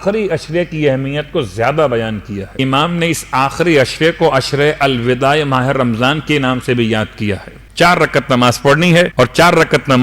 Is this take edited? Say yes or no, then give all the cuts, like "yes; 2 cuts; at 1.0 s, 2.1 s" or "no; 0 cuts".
yes; 3 cuts; at 2.6 s, 7.6 s, 9.1 s